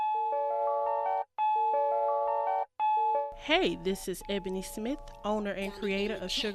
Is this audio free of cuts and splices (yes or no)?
no